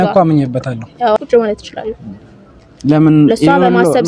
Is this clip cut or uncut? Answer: cut